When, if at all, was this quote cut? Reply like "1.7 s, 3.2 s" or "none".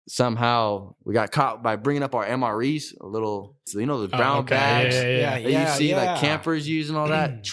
0.9 s, 3.7 s